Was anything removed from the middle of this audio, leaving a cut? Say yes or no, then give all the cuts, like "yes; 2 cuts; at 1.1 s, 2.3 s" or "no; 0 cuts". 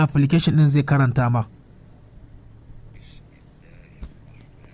no; 0 cuts